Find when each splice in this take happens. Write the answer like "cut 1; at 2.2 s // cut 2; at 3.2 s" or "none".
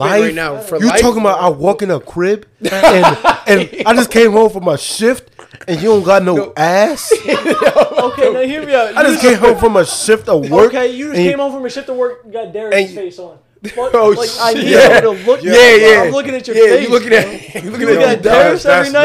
none